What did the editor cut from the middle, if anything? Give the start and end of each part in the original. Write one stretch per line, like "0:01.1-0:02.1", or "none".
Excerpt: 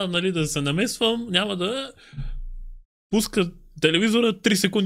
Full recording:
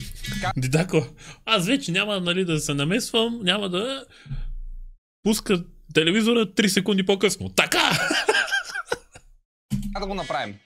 none